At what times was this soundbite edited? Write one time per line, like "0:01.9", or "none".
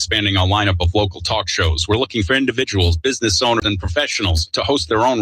0:03.6